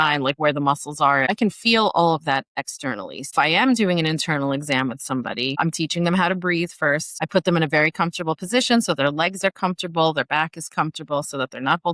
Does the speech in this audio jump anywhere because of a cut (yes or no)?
yes